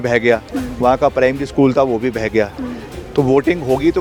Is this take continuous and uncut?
yes; 0 cuts

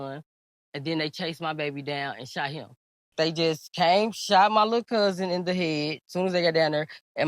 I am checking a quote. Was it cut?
yes; 1 cut; at 3.1 s

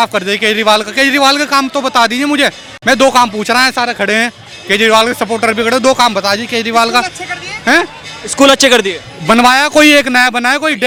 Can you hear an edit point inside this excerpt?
no; 0 cuts

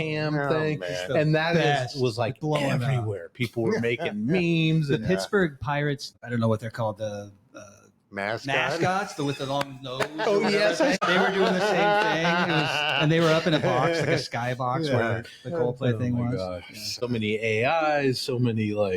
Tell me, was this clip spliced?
yes; 3 cuts; at 6.1 s, 11.0 s, 16.8 s

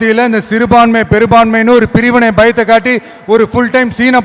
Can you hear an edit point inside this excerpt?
no; 0 cuts

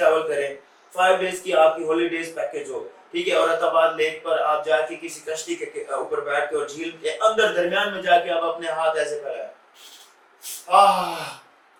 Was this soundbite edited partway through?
no; 0 cuts

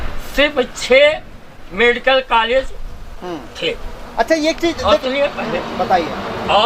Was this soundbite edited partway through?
no; 0 cuts

